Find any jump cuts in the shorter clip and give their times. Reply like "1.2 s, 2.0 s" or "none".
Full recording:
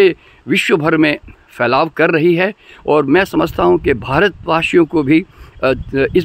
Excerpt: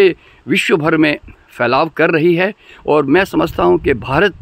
none